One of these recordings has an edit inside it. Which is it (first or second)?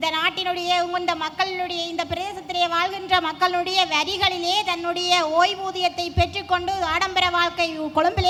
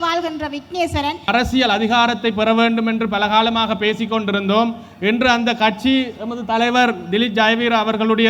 second